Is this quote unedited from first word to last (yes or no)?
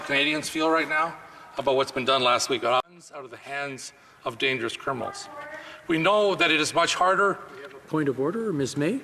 no